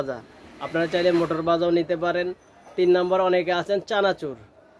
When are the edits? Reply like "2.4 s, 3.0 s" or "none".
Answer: none